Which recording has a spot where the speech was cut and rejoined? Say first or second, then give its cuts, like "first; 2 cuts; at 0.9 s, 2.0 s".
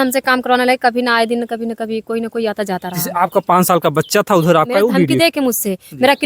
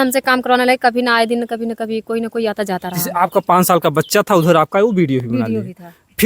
first; 1 cut; at 5.1 s